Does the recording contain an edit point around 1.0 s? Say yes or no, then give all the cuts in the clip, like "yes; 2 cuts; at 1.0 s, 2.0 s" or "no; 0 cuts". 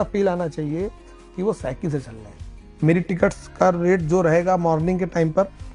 no; 1 cut; at 2.6 s